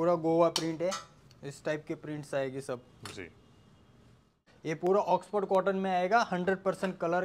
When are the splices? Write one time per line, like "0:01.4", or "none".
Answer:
0:04.5